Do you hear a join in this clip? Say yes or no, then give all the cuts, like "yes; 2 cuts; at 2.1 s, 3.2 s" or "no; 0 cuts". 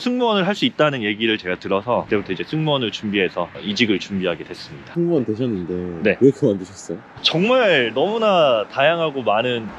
no; 0 cuts